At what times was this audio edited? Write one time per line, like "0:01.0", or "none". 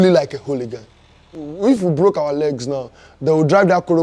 0:01.5